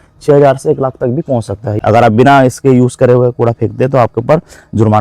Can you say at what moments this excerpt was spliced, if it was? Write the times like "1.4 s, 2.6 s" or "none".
1.8 s